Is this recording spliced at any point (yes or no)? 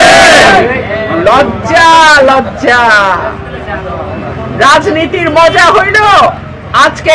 no